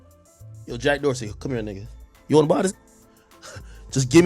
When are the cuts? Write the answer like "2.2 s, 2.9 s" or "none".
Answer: 2.7 s